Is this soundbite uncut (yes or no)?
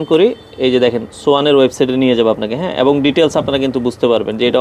yes